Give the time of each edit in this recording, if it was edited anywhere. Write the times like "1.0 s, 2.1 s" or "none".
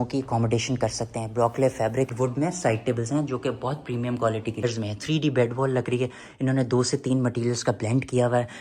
2.1 s, 4.6 s